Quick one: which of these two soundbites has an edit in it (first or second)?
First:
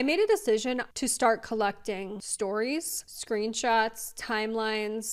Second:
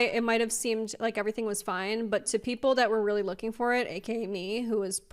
first